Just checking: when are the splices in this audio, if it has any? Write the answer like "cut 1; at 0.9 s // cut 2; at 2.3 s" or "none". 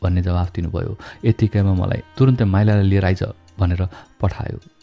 cut 1; at 2.0 s